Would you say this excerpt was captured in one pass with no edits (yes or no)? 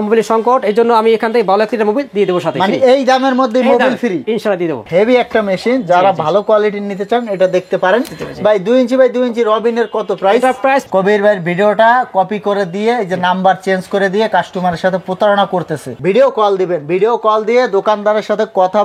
no